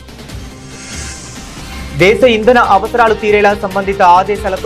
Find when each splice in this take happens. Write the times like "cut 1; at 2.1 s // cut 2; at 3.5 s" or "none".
cut 1; at 1.1 s